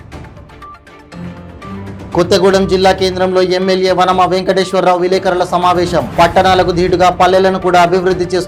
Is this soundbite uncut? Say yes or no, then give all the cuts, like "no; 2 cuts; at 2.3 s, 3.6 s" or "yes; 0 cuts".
yes; 0 cuts